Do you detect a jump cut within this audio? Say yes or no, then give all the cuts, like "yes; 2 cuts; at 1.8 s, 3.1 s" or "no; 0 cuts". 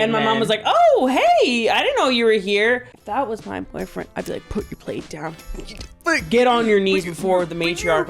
yes; 1 cut; at 2.9 s